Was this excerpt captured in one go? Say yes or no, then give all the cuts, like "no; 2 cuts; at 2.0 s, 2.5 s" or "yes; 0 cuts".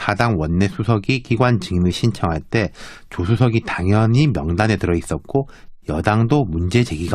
no; 1 cut; at 6.0 s